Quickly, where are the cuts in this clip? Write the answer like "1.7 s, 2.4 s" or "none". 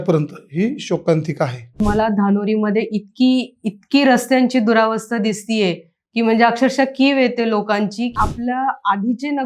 1.8 s, 8.1 s